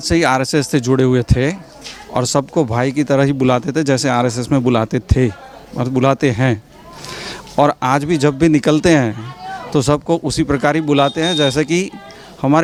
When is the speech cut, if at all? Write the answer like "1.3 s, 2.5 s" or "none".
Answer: none

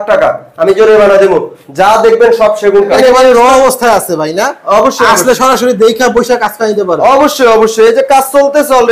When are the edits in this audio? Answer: 2.9 s

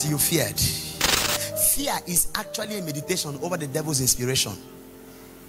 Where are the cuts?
1.1 s

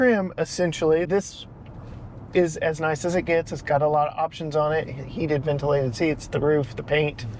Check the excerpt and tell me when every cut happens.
1.1 s

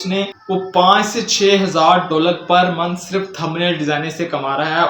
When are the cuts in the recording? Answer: none

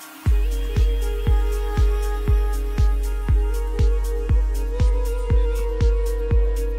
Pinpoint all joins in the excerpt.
none

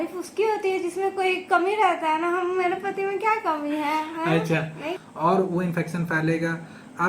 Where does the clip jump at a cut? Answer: 4.9 s

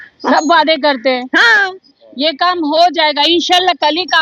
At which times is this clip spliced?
none

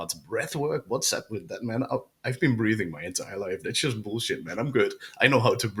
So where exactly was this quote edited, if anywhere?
none

